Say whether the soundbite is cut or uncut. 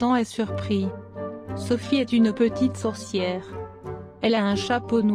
uncut